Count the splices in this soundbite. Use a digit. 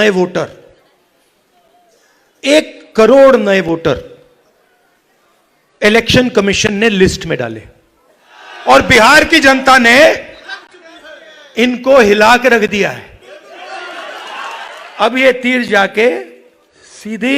2